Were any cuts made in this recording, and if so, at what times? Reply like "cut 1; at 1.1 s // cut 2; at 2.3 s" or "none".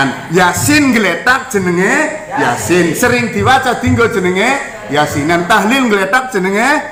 none